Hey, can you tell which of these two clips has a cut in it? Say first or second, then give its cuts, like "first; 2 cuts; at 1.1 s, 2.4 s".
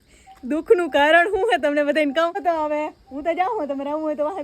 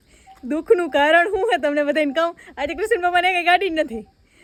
first; 1 cut; at 2.4 s